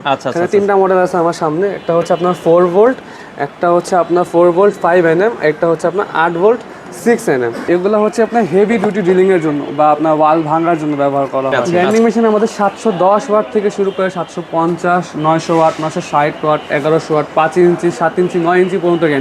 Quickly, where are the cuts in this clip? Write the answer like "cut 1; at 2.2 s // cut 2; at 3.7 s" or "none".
cut 1; at 7.6 s // cut 2; at 11.5 s